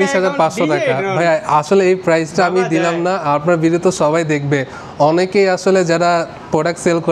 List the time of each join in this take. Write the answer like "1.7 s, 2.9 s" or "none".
none